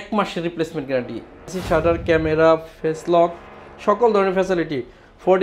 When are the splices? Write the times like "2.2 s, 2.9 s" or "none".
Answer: 1.5 s

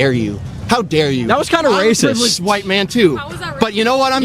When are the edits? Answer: 3.1 s

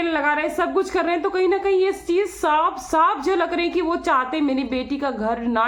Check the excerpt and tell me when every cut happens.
none

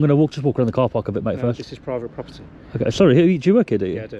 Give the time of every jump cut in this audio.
none

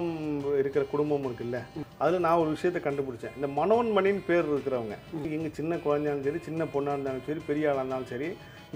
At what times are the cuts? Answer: 1.7 s, 5.3 s

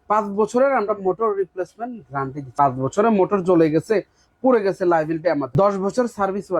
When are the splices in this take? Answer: 2.4 s, 5.5 s

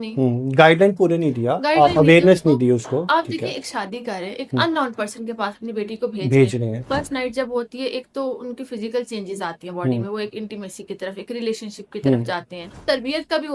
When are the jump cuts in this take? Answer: 6.8 s, 12.8 s

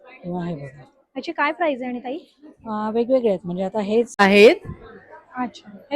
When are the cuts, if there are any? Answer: 4.2 s

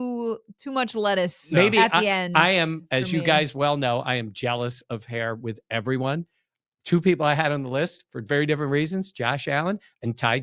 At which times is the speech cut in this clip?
none

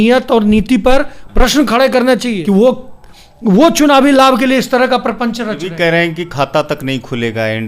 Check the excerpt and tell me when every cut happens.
2.3 s, 5.7 s

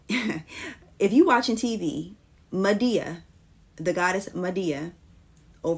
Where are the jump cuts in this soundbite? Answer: none

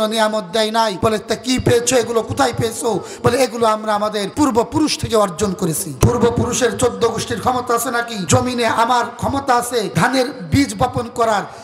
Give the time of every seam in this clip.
1.0 s, 4.2 s, 5.9 s, 8.2 s, 9.9 s

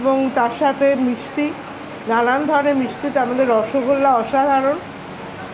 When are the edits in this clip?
none

